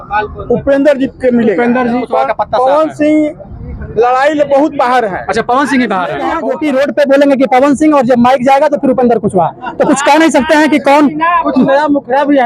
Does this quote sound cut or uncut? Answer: cut